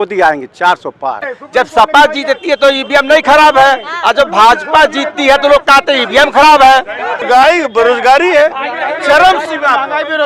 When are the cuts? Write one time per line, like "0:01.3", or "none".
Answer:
0:01.4
0:07.2